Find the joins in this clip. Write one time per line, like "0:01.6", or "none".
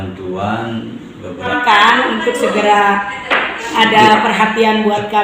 0:01.5

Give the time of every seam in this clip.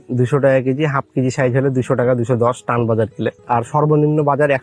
0:03.4

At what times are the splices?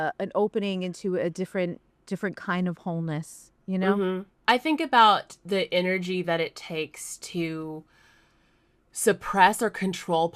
0:01.9
0:04.0

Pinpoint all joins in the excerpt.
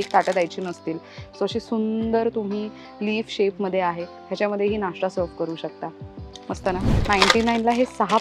0:06.9

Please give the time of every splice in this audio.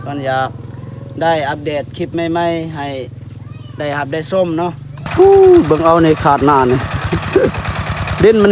0:05.0

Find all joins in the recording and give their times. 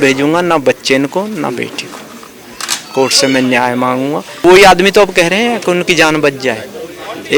0:04.4

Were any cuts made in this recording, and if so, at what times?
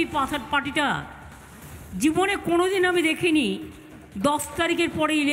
none

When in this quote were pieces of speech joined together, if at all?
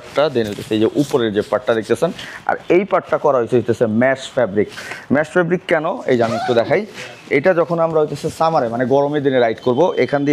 none

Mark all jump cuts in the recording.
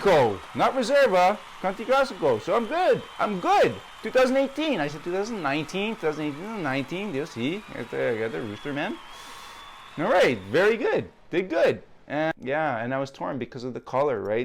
0:12.3

